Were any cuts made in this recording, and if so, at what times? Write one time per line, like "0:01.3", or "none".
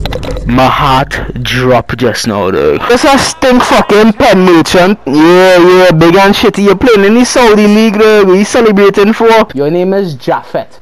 0:02.9
0:09.5